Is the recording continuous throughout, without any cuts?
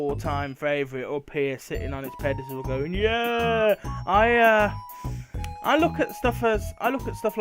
no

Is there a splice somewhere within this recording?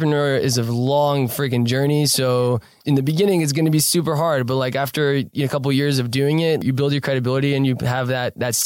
yes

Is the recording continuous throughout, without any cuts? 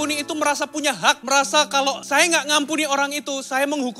no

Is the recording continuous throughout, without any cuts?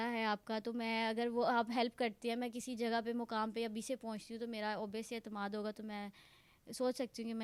yes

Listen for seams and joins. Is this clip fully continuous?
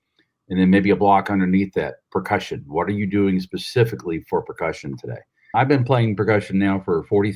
no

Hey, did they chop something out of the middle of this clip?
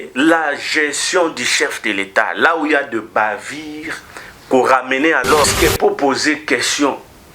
yes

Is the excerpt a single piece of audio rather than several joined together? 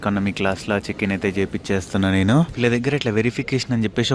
no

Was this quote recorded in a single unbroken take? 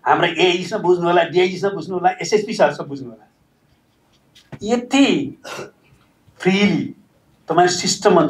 yes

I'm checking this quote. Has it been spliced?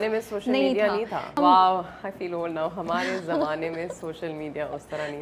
yes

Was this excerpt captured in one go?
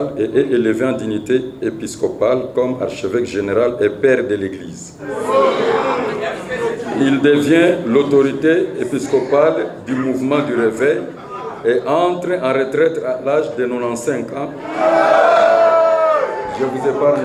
yes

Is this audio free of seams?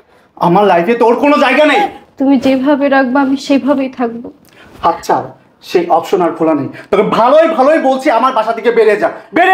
no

